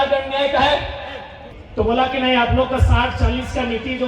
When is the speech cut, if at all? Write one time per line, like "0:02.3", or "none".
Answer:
0:01.7